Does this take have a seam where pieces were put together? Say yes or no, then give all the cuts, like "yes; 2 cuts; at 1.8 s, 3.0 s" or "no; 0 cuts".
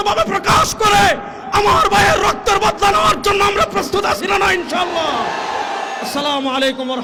no; 0 cuts